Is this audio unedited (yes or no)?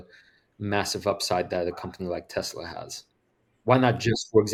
yes